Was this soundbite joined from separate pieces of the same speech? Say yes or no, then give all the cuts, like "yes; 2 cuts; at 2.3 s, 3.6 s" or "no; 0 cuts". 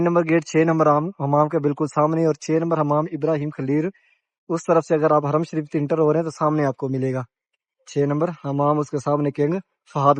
no; 0 cuts